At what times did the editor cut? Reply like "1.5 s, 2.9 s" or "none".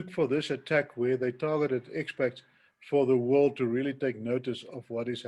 none